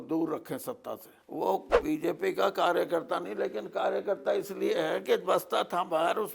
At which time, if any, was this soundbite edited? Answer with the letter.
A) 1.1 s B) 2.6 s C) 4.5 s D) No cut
A